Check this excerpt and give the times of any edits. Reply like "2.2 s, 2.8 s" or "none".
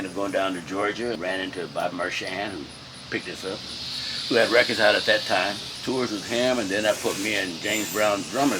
1.2 s, 5.7 s